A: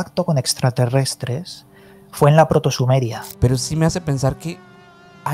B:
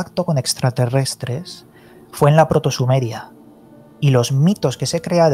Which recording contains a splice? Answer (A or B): A